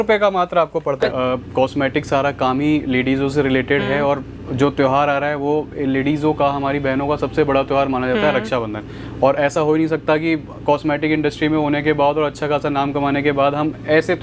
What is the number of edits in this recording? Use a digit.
1